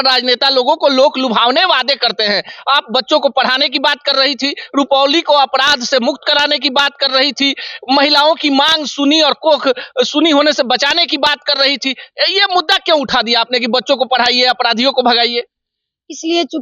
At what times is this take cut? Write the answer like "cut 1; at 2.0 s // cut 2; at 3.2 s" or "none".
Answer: none